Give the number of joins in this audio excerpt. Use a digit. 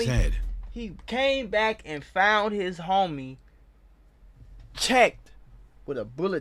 0